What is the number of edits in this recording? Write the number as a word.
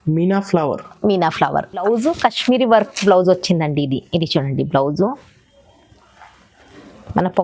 one